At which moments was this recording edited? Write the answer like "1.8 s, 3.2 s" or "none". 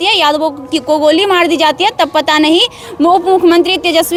none